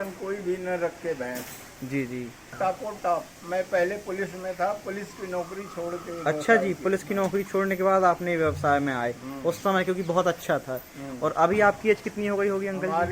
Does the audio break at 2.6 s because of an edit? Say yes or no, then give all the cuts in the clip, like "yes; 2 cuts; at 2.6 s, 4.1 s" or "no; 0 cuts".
yes; 1 cut; at 2.6 s